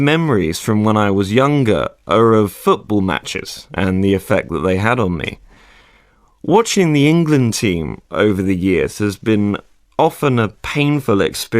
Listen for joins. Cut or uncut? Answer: cut